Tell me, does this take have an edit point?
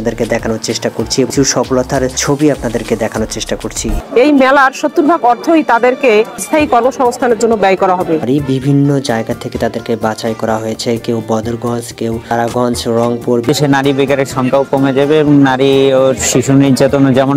yes; 6 cuts; at 1.3 s, 4.0 s, 6.5 s, 8.2 s, 12.3 s, 13.5 s

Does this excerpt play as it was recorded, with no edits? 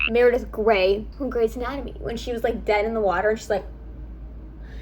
no; 1 cut; at 1.1 s

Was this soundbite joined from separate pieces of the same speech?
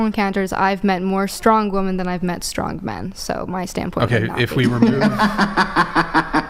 no; 0 cuts

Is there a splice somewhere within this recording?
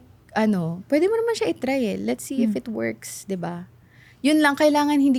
no; 0 cuts

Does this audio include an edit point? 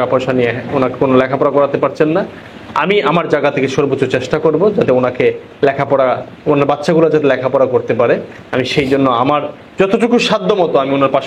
no; 0 cuts

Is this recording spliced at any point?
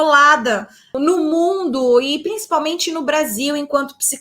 yes; 1 cut; at 1.0 s

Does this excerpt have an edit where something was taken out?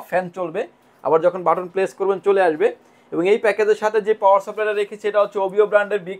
no; 0 cuts

